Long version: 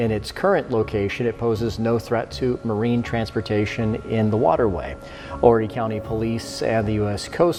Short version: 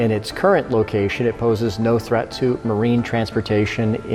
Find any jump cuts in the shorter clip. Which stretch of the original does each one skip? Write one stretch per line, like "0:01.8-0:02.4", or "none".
none